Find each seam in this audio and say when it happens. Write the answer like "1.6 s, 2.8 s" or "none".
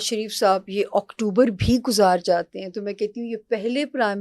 none